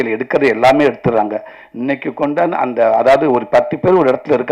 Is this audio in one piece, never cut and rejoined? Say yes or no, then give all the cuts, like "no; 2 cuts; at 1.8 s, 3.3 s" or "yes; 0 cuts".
yes; 0 cuts